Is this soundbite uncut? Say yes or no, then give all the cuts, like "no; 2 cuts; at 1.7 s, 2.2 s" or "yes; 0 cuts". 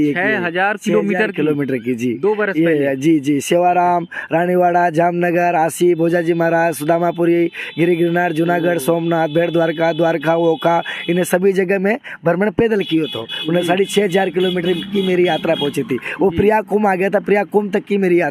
yes; 0 cuts